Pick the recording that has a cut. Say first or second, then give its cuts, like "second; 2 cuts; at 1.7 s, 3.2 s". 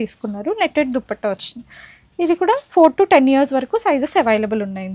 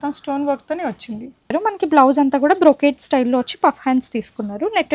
second; 1 cut; at 1.5 s